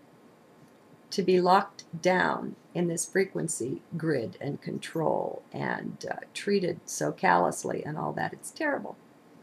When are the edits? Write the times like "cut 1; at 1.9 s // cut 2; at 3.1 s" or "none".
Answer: cut 1; at 3.5 s